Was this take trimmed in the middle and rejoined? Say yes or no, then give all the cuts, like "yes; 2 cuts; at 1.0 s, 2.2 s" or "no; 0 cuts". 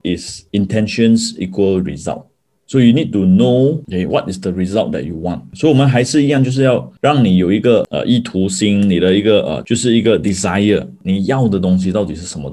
yes; 2 cuts; at 5.5 s, 11.0 s